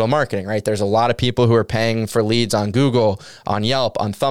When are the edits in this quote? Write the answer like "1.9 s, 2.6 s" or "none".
none